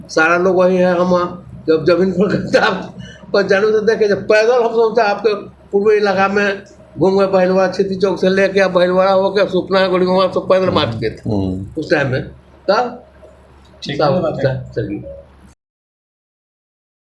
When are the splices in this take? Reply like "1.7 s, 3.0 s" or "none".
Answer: none